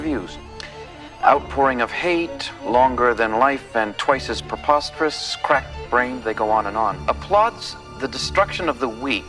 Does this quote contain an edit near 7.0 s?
yes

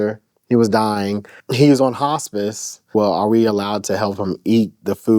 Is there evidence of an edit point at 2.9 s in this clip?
yes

